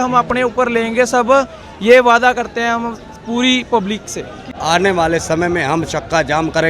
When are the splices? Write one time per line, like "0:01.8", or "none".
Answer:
0:04.5